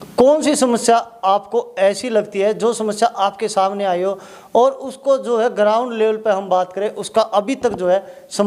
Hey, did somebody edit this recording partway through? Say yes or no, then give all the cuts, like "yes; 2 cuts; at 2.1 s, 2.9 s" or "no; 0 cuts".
no; 0 cuts